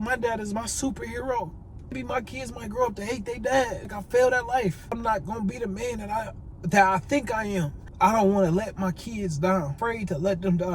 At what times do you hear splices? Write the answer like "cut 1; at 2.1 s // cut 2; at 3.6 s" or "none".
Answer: cut 1; at 1.9 s // cut 2; at 3.8 s // cut 3; at 5.0 s // cut 4; at 7.8 s // cut 5; at 9.8 s